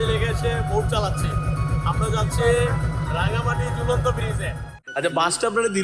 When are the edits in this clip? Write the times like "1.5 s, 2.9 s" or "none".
4.6 s